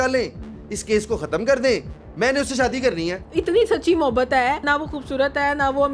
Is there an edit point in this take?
yes; 2 cuts; at 3.3 s, 4.6 s

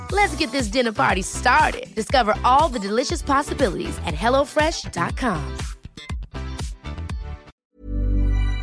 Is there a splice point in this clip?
yes; 1 cut; at 7.6 s

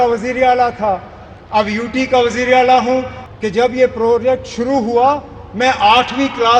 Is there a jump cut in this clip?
yes; 1 cut; at 3.2 s

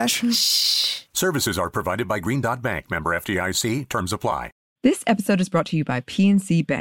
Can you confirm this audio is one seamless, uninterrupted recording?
no; 1 cut; at 4.6 s

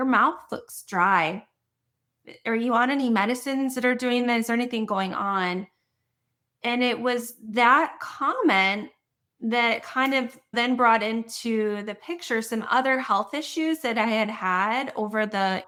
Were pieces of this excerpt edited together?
no; 0 cuts

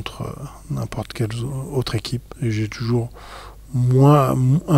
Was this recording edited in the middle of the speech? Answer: yes; 1 cut; at 1.9 s

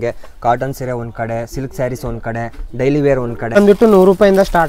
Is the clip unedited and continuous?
no; 1 cut; at 3.6 s

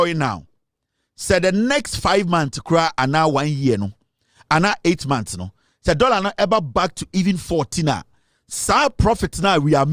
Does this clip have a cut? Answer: no; 0 cuts

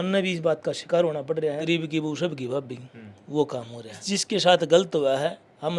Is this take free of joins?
no; 2 cuts; at 1.6 s, 4.0 s

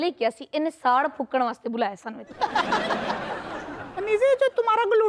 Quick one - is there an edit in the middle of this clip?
yes; 1 cut; at 3.8 s

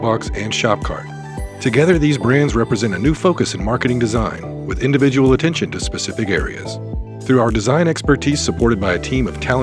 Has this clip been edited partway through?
no; 0 cuts

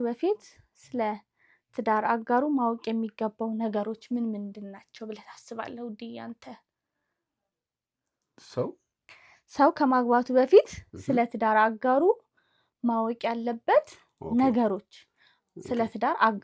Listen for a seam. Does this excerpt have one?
no; 0 cuts

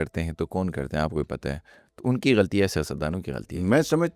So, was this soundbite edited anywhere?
no; 0 cuts

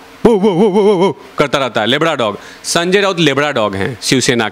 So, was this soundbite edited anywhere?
no; 0 cuts

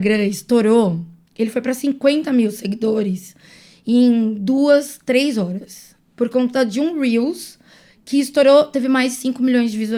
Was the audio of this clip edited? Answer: no; 0 cuts

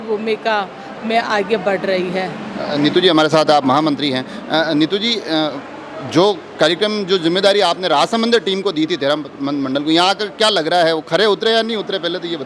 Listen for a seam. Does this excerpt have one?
no; 0 cuts

